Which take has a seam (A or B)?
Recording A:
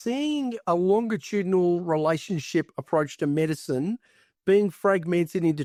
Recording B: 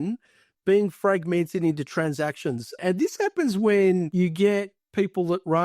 B